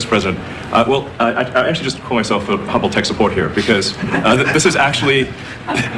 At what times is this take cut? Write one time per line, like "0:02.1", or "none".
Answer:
none